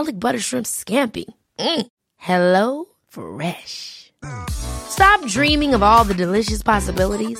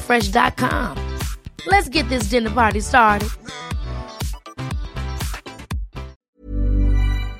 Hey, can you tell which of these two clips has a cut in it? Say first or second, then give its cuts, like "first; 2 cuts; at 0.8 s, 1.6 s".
second; 1 cut; at 6.2 s